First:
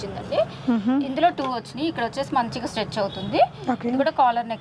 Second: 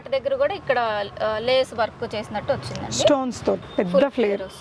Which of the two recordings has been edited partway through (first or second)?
second